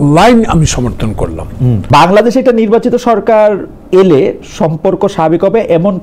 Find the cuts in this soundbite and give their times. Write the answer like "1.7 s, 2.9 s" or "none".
1.8 s